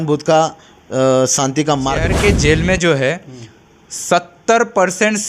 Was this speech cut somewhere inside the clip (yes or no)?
yes